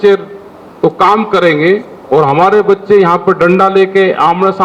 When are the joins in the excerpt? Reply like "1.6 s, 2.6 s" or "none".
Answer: none